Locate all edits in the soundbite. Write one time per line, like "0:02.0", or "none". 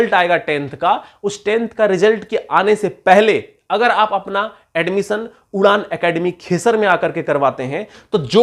none